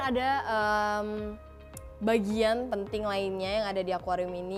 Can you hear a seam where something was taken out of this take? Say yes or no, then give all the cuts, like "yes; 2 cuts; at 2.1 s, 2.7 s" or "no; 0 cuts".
no; 0 cuts